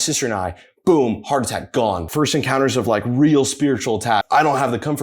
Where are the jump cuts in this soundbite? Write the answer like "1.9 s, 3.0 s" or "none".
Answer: 2.0 s, 4.2 s